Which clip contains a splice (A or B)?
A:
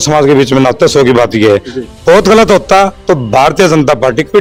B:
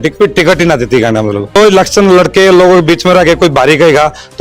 B